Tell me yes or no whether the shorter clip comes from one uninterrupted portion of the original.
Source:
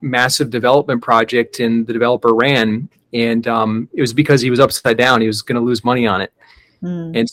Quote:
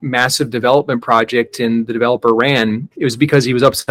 no